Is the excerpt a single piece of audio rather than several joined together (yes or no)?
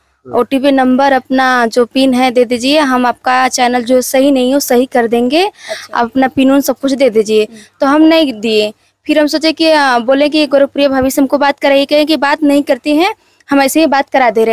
yes